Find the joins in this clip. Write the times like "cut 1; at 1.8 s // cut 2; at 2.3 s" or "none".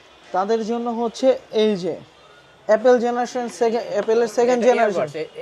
none